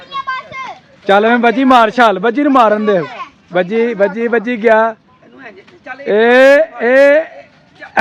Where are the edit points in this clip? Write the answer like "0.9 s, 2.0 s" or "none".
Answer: none